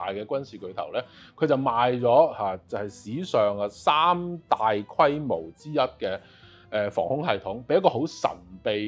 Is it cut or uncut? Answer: uncut